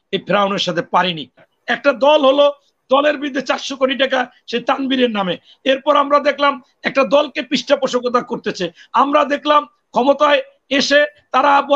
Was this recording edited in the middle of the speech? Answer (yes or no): yes